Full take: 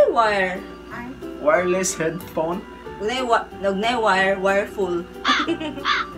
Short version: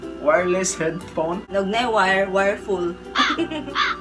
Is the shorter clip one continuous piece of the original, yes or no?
no